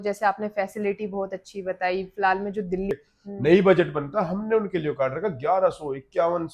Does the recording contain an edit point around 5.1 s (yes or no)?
no